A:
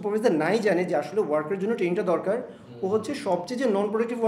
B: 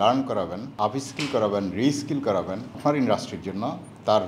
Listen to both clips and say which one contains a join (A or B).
B